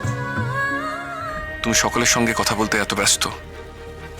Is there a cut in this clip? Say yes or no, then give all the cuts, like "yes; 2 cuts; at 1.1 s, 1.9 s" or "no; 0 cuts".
yes; 1 cut; at 1.3 s